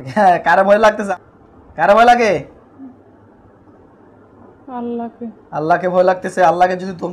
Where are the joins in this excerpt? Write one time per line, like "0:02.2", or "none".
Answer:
0:01.0